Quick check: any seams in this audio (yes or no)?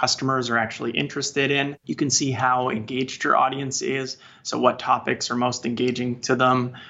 yes